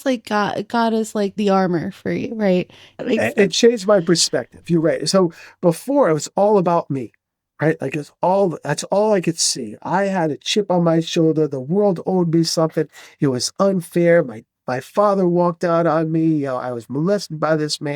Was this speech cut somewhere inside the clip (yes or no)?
yes